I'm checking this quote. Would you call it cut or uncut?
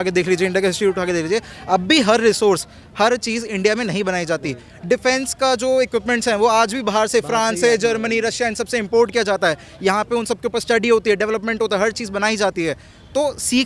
uncut